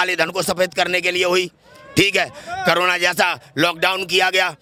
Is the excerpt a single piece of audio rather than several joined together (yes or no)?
yes